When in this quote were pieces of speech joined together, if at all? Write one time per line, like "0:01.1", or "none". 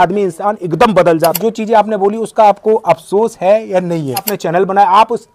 0:01.4
0:04.3